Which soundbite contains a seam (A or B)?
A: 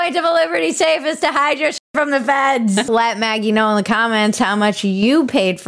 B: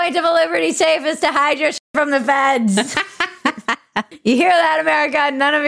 A